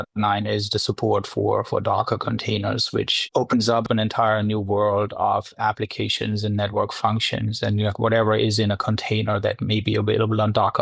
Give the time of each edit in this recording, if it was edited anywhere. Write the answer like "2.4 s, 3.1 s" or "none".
3.8 s